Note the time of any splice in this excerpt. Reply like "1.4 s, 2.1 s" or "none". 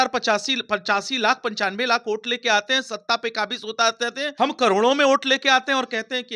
4.3 s